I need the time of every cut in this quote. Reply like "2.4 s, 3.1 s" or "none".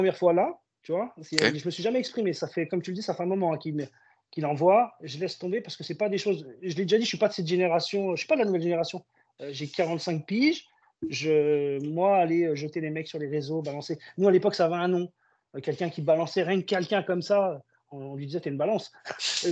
none